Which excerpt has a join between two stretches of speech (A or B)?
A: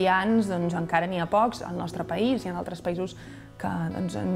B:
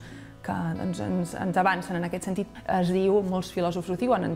B